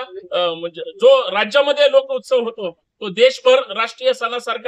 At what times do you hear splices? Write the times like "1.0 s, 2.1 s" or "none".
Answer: none